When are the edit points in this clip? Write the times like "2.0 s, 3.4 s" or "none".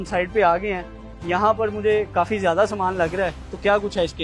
none